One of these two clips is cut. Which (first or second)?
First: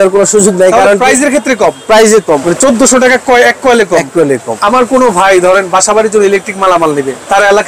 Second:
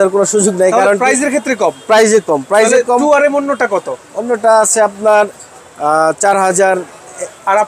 first